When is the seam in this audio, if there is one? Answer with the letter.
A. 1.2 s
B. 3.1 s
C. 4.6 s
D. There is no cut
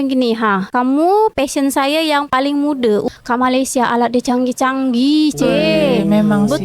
B